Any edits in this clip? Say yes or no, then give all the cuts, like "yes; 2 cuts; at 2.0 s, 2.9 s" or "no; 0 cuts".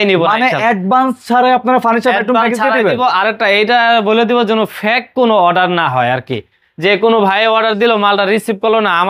no; 0 cuts